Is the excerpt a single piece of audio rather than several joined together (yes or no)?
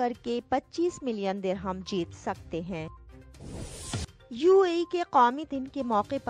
no